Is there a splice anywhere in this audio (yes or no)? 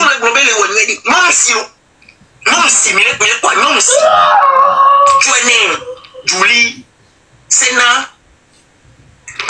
no